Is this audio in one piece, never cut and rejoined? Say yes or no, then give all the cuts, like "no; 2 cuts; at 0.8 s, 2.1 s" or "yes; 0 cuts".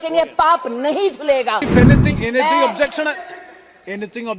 no; 1 cut; at 1.7 s